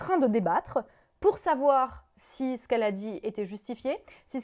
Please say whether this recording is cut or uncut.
uncut